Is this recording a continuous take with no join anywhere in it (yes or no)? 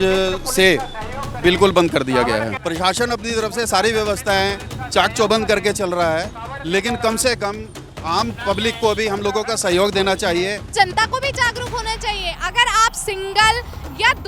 no